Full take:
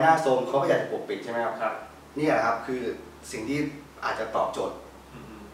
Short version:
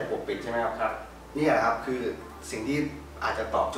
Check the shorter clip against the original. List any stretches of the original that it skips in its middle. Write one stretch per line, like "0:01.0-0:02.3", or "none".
none